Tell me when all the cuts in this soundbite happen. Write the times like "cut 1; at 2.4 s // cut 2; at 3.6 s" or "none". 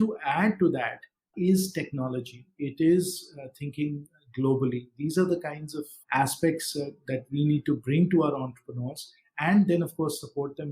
none